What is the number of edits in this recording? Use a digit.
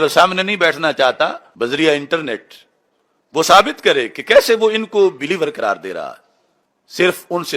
1